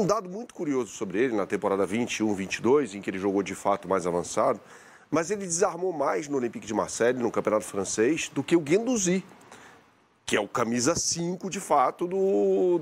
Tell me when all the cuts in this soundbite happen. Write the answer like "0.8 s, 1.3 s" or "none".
none